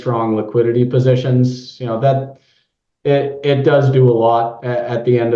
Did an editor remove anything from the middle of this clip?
no; 0 cuts

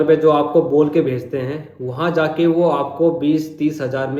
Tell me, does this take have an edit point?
no; 0 cuts

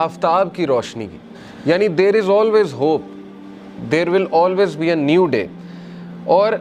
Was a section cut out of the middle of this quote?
no; 0 cuts

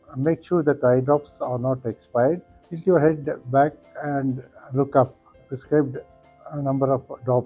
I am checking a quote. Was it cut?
yes; 2 cuts; at 2.7 s, 5.3 s

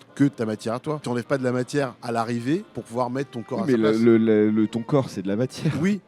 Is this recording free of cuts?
no; 3 cuts; at 1.0 s, 2.0 s, 2.8 s

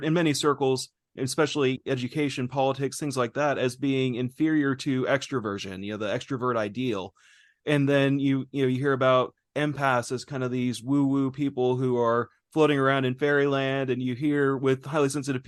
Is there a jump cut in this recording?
no; 0 cuts

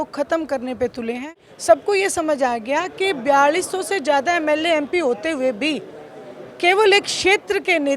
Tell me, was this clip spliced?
yes; 1 cut; at 1.5 s

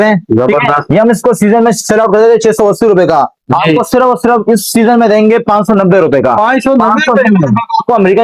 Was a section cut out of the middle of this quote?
no; 0 cuts

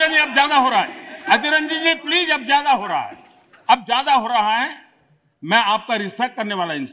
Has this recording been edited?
no; 0 cuts

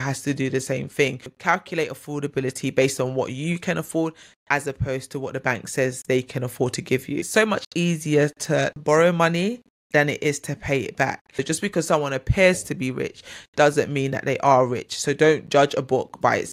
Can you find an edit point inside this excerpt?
yes; 3 cuts; at 1.2 s, 7.3 s, 11.4 s

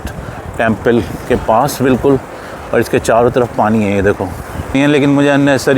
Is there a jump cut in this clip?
yes; 1 cut; at 4.7 s

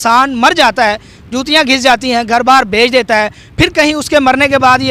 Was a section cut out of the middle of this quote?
no; 0 cuts

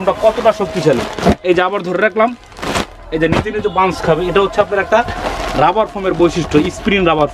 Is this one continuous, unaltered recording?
yes; 0 cuts

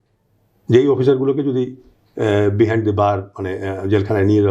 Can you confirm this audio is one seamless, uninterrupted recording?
yes; 0 cuts

